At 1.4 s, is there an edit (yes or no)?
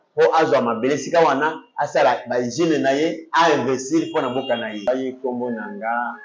no